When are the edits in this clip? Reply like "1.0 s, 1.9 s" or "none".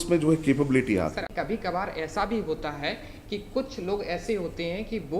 1.3 s